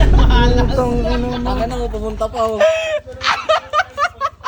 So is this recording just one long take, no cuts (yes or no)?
yes